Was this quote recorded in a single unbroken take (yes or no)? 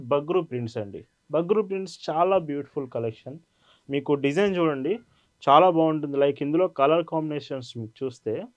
yes